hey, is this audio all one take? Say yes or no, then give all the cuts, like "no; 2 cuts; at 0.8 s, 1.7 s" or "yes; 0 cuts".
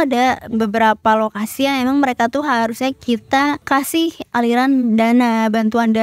no; 1 cut; at 4.1 s